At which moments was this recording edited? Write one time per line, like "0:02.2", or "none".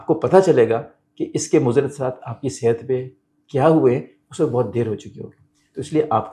none